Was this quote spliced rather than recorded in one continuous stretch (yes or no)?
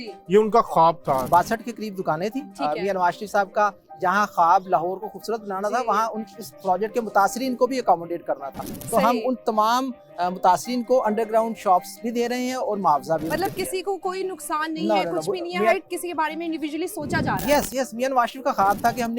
yes